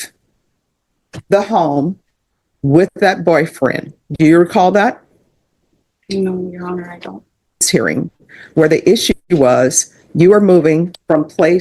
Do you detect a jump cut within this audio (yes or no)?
yes